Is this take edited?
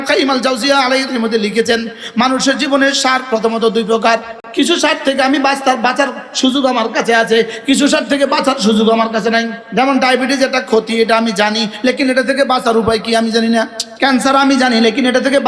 yes; 4 cuts; at 1.0 s, 4.4 s, 9.6 s, 13.8 s

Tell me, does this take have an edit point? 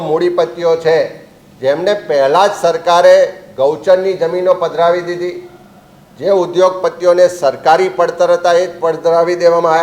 no; 0 cuts

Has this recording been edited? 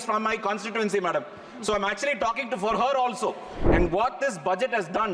yes; 1 cut; at 3.6 s

